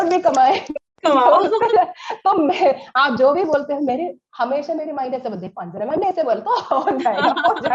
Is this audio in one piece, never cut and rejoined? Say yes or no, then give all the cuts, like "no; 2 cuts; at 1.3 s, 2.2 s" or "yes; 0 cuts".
yes; 0 cuts